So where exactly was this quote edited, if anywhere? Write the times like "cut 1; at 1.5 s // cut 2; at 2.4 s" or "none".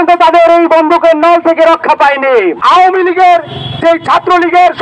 cut 1; at 2.6 s